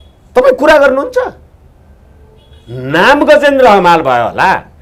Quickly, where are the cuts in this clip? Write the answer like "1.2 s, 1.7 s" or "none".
none